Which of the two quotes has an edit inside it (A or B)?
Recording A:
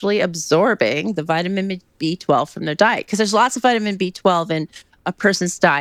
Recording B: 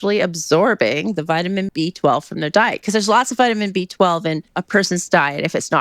B